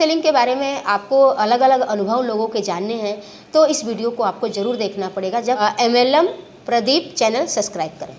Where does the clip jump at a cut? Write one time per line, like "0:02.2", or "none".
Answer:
0:05.6